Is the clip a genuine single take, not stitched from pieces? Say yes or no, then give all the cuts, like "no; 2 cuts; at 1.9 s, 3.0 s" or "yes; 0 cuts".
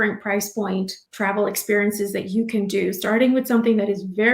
no; 1 cut; at 1.0 s